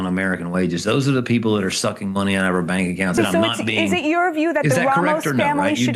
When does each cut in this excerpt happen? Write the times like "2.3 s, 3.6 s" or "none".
3.2 s